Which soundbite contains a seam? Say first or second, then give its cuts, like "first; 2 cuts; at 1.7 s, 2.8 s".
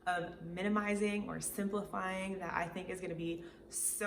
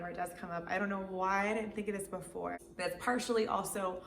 second; 1 cut; at 2.7 s